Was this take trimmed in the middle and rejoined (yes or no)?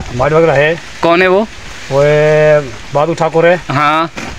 no